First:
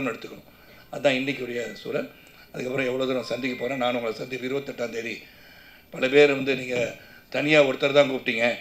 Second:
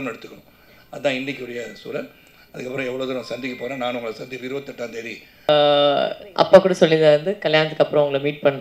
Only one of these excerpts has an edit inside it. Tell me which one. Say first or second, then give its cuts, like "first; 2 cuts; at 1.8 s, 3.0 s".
second; 1 cut; at 5.5 s